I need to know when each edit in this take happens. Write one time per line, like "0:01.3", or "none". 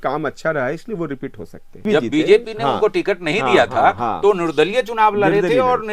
0:01.8